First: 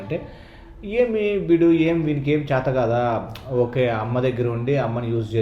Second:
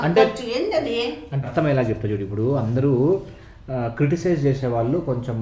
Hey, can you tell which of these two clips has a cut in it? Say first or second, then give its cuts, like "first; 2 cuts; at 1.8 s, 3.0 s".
second; 1 cut; at 1.4 s